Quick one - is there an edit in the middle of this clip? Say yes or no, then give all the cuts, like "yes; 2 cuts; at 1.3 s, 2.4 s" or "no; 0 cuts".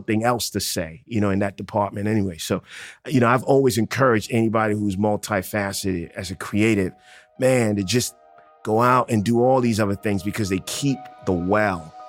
no; 0 cuts